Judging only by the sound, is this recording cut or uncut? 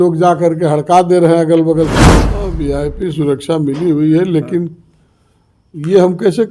cut